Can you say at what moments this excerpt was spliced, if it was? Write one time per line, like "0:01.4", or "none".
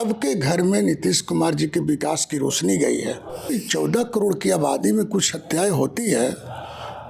0:03.5